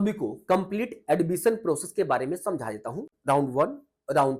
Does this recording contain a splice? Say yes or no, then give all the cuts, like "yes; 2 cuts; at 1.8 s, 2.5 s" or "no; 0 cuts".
no; 0 cuts